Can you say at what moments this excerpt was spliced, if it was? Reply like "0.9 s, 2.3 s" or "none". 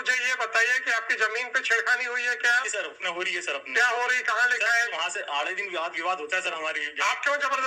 none